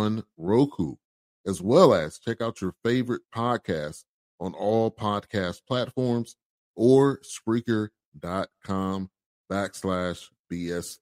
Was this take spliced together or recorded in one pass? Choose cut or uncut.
uncut